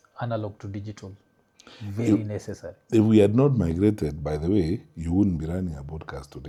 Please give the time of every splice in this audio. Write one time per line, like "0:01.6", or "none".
none

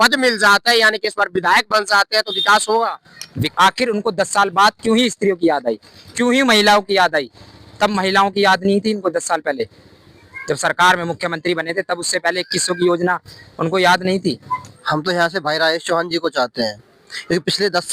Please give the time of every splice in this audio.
0:03.5
0:14.7

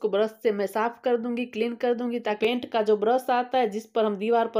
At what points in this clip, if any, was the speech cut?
0:02.4

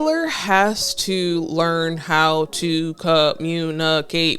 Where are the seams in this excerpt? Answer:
none

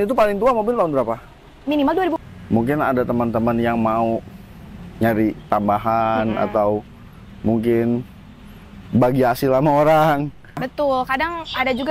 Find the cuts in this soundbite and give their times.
0:02.2
0:10.7

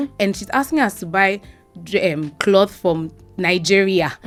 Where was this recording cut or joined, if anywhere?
none

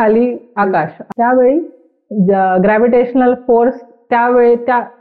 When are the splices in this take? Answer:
0:01.1

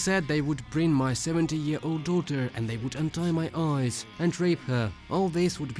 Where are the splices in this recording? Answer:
none

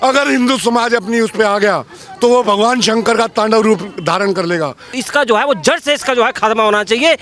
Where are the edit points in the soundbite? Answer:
0:05.0

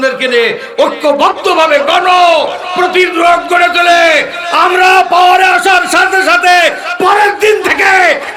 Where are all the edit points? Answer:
none

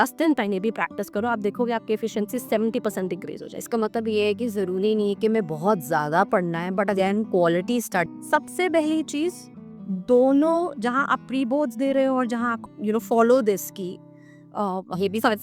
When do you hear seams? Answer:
0:08.1
0:12.6

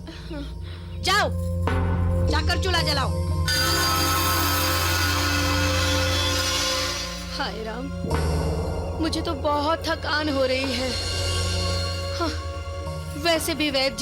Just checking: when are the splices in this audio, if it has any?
none

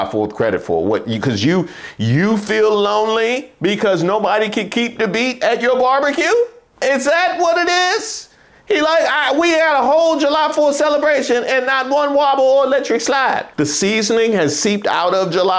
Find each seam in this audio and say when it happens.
0:13.5

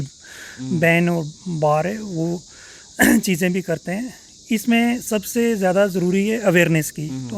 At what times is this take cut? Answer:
none

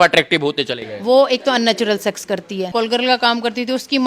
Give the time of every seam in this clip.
0:02.7

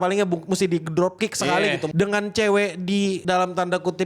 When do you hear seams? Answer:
0:01.9
0:03.2

